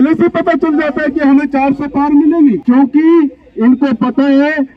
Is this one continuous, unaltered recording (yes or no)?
no